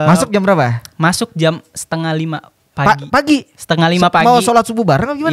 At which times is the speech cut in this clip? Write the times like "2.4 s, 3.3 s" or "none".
none